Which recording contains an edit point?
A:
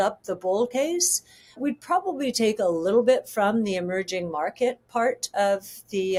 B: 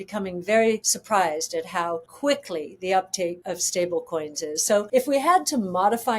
B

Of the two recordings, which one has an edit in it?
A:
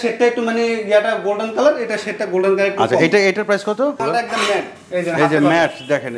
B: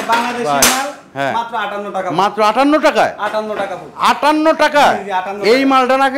A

